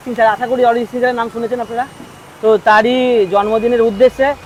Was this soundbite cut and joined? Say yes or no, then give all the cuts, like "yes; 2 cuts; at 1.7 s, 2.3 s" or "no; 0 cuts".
no; 0 cuts